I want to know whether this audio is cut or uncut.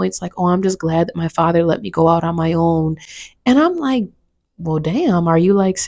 uncut